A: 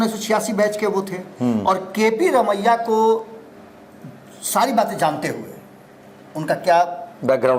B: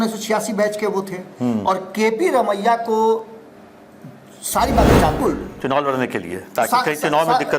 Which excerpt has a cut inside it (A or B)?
B